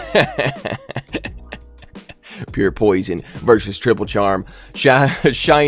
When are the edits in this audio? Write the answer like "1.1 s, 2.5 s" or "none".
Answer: none